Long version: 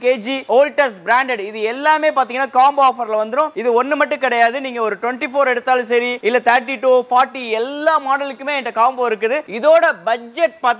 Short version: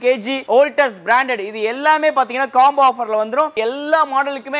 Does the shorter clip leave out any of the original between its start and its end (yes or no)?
yes